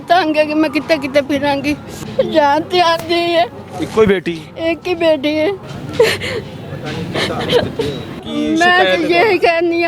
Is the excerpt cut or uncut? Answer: cut